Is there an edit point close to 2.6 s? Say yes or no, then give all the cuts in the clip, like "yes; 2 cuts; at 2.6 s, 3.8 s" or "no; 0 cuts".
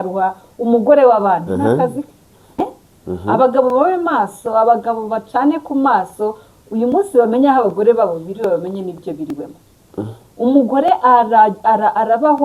yes; 1 cut; at 2.6 s